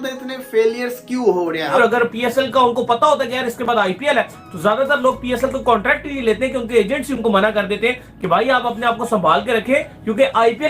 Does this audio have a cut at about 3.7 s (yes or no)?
no